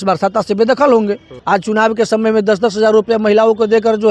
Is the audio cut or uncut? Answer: cut